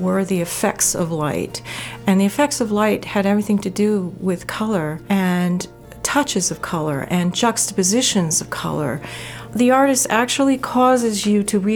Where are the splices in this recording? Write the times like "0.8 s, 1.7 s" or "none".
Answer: 5.0 s, 9.5 s

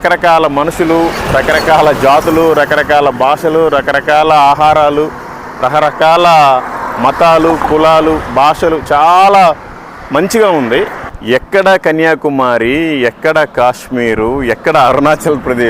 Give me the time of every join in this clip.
11.5 s

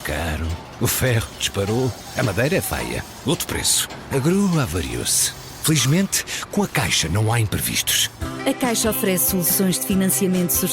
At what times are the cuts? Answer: none

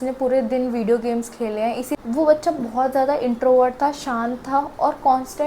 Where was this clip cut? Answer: 2.0 s

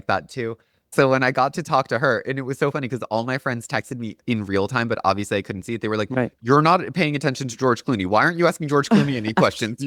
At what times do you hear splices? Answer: none

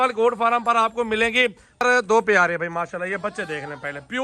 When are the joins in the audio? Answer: 1.8 s

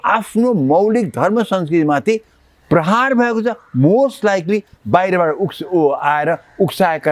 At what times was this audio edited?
none

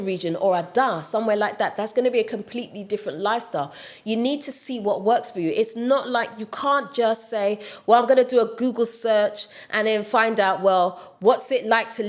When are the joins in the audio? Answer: none

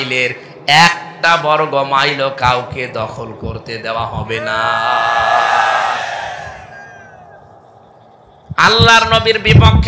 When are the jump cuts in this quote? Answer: 8.4 s

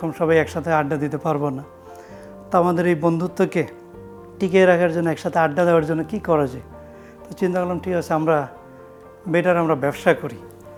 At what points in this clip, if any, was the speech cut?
none

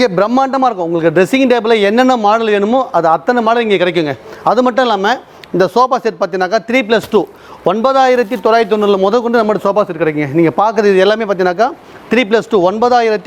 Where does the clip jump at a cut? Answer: none

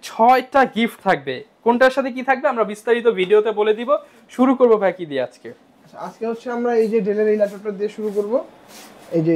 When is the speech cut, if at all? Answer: none

